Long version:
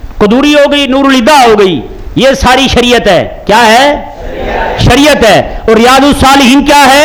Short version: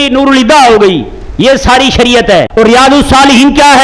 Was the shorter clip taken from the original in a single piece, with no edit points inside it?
no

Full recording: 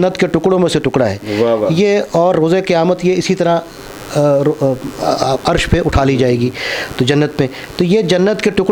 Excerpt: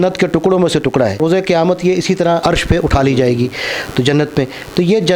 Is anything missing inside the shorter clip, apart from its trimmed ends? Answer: yes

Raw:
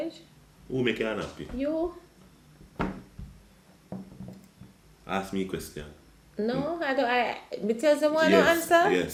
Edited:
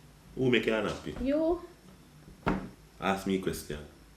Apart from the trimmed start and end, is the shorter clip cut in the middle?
yes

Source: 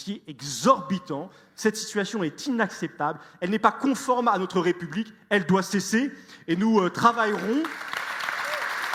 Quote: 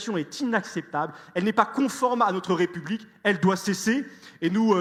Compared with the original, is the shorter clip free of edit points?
yes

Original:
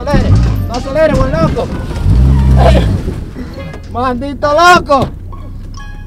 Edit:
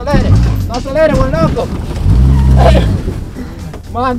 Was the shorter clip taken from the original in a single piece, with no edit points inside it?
yes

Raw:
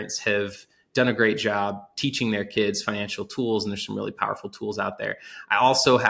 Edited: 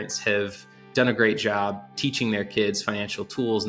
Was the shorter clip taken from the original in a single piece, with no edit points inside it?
yes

